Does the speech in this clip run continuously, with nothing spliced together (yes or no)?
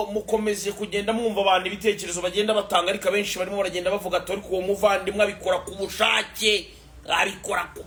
yes